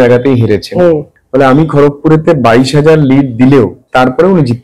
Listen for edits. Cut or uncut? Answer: cut